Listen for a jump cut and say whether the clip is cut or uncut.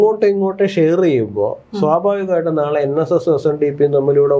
uncut